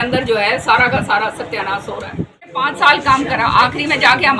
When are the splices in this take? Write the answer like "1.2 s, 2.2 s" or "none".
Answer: 2.6 s